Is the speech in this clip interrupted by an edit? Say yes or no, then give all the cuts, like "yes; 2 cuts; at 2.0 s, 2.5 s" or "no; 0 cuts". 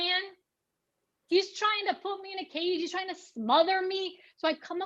no; 0 cuts